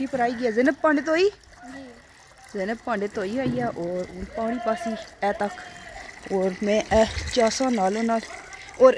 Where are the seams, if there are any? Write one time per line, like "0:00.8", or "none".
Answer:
none